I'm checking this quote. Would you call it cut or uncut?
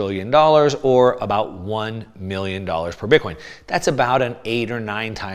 uncut